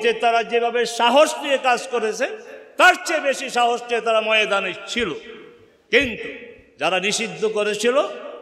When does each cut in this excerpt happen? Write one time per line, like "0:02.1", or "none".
none